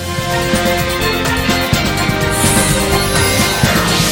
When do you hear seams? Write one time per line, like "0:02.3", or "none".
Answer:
none